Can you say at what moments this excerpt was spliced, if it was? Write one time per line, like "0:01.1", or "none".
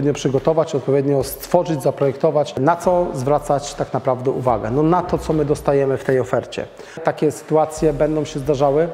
0:02.6
0:07.0

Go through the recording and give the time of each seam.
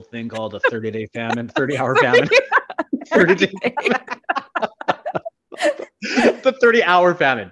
none

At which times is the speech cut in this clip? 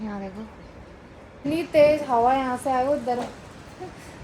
0:01.4

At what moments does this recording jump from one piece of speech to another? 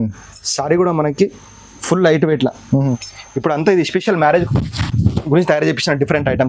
0:03.0

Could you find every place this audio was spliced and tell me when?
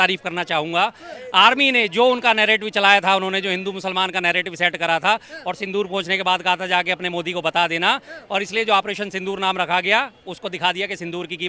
none

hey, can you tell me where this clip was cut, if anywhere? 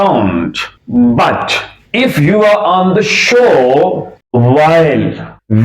0:04.1

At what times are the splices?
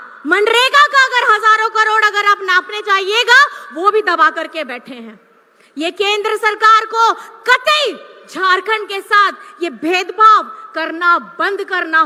none

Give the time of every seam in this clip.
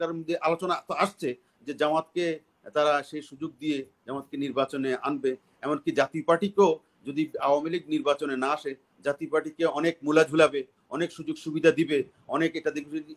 none

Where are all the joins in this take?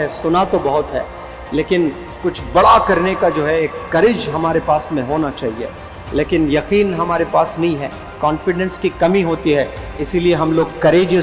none

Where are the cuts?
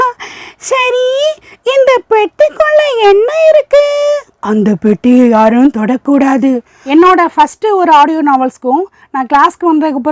0:04.3
0:06.7

